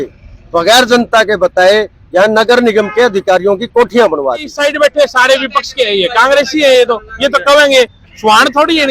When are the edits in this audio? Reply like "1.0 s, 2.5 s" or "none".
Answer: 4.5 s